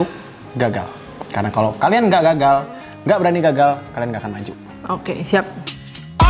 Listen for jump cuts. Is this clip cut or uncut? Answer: uncut